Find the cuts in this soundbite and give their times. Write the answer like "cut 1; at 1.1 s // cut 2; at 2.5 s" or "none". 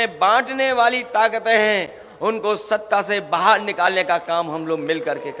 none